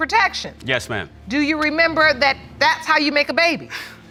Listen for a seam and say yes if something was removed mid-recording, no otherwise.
no